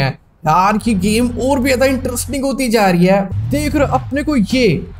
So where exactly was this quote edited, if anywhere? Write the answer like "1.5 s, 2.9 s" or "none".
3.3 s